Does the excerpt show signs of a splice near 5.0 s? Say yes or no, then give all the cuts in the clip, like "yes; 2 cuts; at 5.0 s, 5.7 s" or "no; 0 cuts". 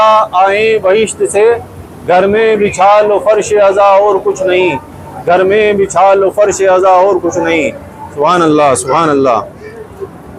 no; 0 cuts